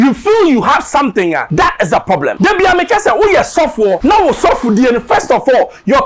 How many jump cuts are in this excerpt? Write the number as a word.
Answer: three